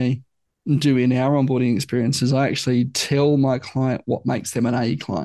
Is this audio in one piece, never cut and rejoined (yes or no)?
yes